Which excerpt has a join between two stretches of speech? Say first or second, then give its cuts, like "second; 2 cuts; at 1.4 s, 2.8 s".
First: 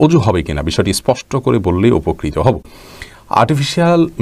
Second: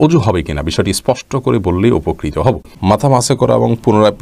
second; 1 cut; at 2.7 s